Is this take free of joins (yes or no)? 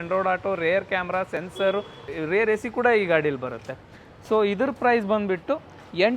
no